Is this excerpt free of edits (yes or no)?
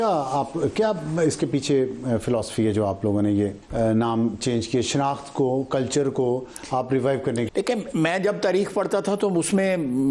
no